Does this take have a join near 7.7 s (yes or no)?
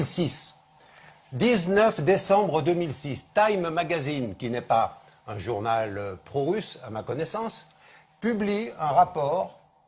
no